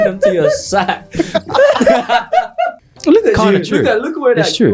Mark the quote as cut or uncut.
cut